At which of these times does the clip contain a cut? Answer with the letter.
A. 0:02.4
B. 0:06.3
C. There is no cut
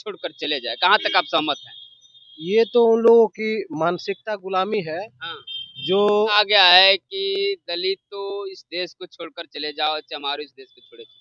B